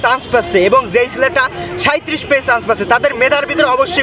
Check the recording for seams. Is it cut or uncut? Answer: uncut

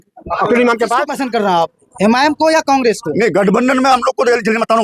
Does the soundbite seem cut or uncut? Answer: cut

